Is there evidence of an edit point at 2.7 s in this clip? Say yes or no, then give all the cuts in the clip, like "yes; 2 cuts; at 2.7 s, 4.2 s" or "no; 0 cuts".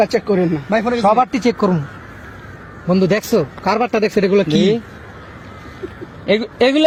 no; 0 cuts